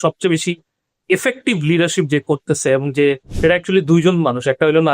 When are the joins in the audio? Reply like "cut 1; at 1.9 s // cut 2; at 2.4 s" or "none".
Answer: cut 1; at 3.3 s